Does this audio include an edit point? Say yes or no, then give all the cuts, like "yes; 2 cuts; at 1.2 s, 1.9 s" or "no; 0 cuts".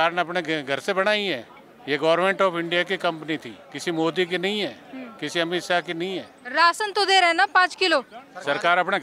yes; 2 cuts; at 3.6 s, 6.4 s